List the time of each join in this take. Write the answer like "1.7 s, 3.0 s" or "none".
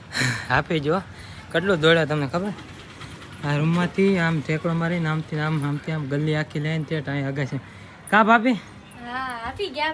none